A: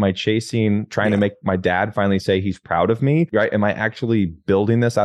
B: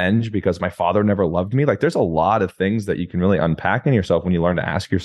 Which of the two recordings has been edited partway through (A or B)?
A